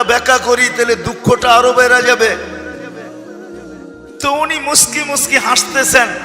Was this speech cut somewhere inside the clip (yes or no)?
yes